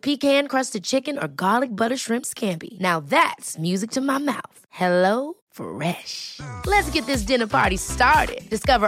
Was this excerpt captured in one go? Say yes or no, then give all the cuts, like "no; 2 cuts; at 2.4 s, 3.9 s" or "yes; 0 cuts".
yes; 0 cuts